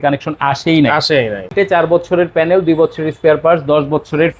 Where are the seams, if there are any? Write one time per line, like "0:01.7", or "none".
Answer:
0:01.5